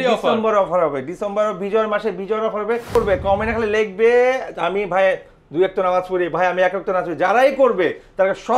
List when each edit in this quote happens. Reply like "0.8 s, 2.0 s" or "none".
3.0 s

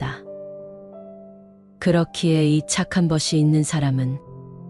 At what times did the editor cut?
none

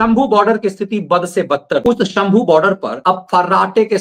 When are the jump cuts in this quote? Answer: 1.8 s, 2.9 s

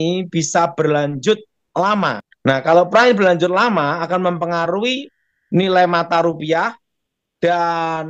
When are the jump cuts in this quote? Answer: 2.3 s

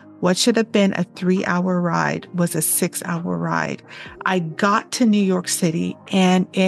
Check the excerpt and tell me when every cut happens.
4.5 s

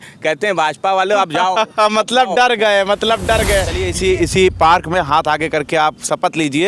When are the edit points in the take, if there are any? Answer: 3.8 s

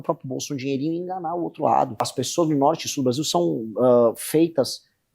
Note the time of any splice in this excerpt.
2.2 s

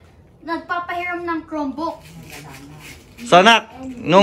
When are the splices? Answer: 2.6 s

